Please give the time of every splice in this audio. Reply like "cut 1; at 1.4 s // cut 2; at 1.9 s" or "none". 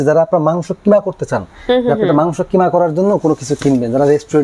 none

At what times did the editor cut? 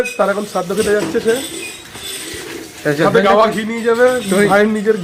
none

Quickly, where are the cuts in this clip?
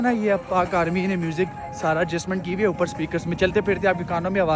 none

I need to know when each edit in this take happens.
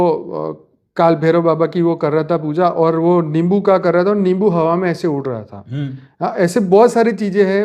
none

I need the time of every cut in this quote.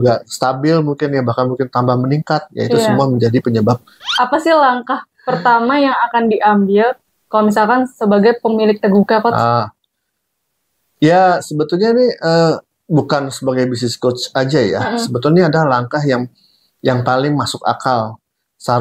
cut 1; at 4.1 s

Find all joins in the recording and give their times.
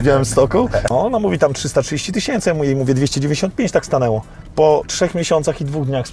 cut 1; at 0.9 s // cut 2; at 4.4 s

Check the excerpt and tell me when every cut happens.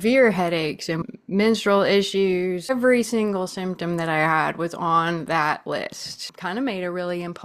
cut 1; at 1.0 s // cut 2; at 2.7 s // cut 3; at 6.3 s

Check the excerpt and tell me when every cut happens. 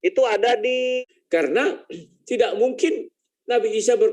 cut 1; at 1.0 s

